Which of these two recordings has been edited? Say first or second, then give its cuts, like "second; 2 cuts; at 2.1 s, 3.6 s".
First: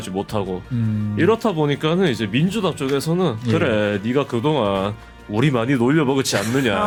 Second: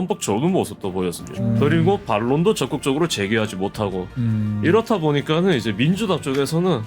second; 1 cut; at 1.4 s